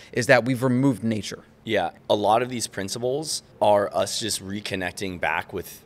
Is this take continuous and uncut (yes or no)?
no